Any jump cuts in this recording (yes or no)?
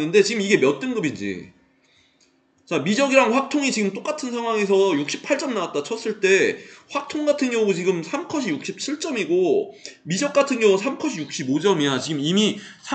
no